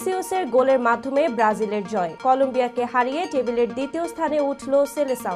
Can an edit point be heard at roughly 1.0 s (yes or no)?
no